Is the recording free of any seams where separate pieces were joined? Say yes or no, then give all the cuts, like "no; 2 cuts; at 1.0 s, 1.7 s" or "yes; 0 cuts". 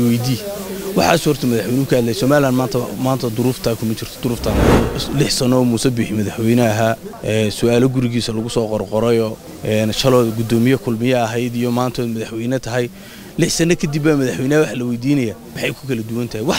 no; 4 cuts; at 4.7 s, 7.1 s, 9.5 s, 15.5 s